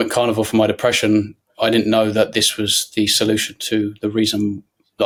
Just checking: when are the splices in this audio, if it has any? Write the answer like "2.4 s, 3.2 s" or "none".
none